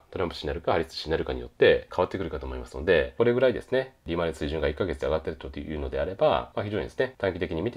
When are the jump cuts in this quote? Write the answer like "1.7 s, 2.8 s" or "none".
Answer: 1.9 s, 3.1 s, 6.7 s